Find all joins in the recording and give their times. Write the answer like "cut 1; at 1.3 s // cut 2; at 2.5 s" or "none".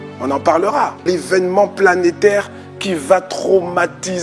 cut 1; at 1.0 s